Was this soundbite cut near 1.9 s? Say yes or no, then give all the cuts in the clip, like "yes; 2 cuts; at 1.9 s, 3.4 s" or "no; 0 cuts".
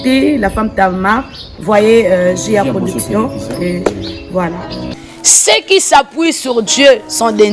no; 1 cut; at 4.9 s